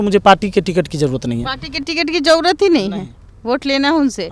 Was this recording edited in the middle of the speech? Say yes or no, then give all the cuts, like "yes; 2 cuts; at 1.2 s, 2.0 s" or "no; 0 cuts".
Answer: no; 0 cuts